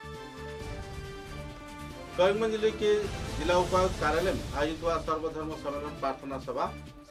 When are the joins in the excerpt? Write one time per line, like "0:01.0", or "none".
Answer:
none